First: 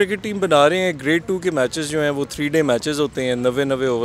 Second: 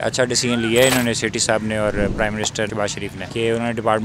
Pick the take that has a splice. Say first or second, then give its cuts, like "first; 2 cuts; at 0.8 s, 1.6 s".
second; 1 cut; at 2.7 s